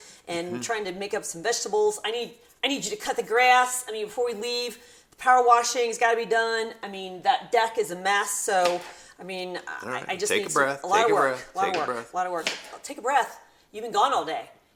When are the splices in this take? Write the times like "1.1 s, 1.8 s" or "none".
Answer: none